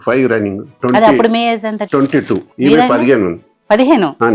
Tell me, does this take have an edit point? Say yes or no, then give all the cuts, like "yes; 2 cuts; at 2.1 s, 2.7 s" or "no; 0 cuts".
yes; 2 cuts; at 0.8 s, 2.0 s